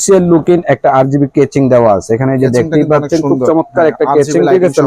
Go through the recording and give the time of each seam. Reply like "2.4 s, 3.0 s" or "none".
none

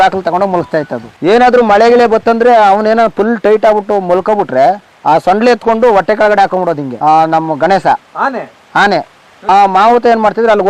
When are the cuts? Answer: 1.0 s, 4.9 s, 6.9 s, 9.3 s

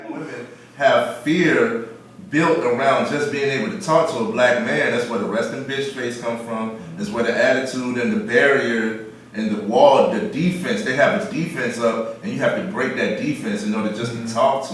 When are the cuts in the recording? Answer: none

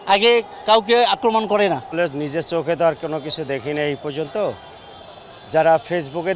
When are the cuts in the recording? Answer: none

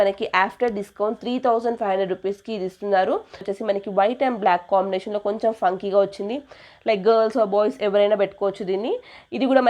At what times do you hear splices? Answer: 3.5 s

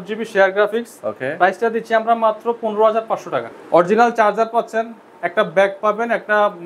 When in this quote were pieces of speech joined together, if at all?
3.5 s

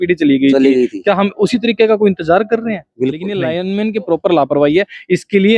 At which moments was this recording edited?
3.3 s

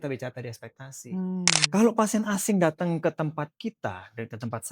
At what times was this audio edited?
1.6 s

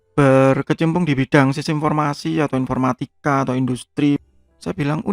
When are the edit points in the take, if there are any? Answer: 4.2 s

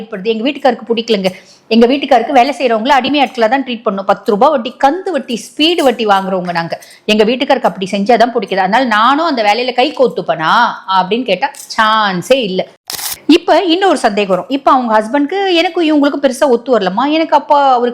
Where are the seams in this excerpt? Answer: 13.1 s

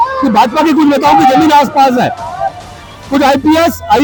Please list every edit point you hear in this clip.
none

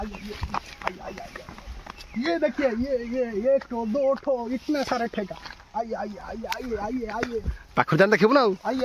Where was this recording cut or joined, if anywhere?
none

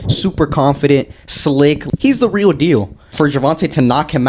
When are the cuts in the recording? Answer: 1.8 s, 3.0 s

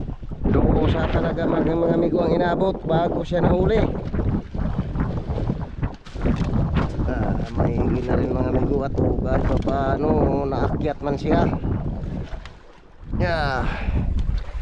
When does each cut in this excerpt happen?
4.3 s

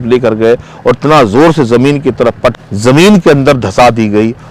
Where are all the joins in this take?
2.5 s

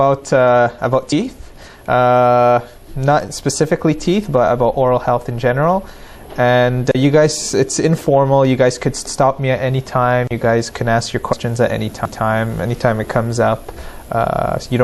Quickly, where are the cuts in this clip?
4.0 s

